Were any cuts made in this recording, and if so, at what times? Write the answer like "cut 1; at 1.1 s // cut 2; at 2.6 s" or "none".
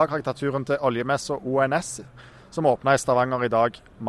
none